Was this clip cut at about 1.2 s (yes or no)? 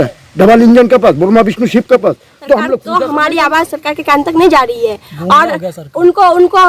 no